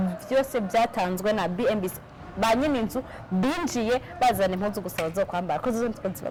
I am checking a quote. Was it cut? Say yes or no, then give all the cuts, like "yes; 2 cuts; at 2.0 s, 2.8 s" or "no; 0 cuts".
no; 0 cuts